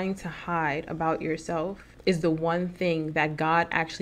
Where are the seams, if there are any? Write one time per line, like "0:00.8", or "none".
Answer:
0:01.9